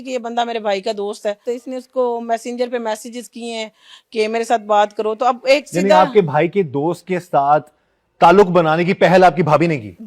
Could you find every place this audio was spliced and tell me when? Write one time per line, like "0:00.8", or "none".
0:01.4

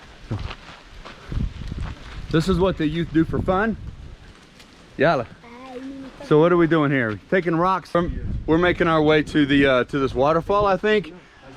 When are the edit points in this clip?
0:07.8

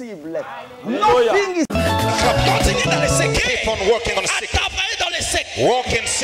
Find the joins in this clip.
0:03.4

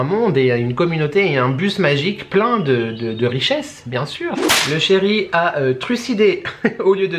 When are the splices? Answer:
none

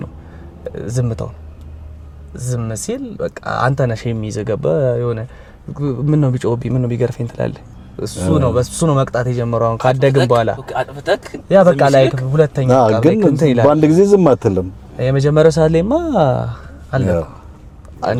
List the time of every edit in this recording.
none

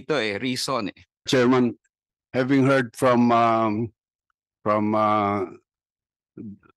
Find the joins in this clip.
0:01.3

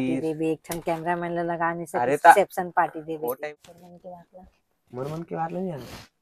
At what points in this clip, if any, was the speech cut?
0:03.4

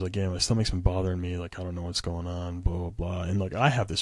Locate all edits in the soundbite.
none

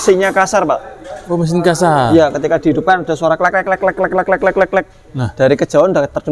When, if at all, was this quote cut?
none

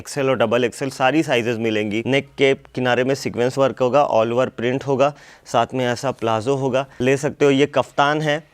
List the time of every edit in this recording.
0:02.0
0:06.9

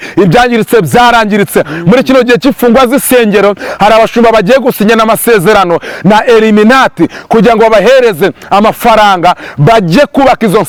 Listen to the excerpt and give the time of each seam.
none

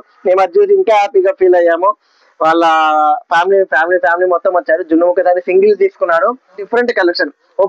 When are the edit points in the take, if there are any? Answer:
0:06.7

